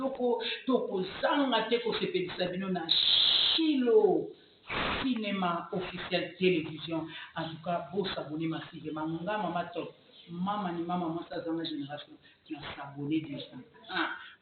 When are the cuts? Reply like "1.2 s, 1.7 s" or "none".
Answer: none